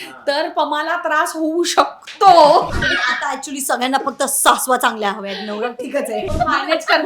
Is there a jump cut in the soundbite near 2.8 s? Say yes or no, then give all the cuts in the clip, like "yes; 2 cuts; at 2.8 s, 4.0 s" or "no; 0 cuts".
yes; 2 cuts; at 2.8 s, 6.3 s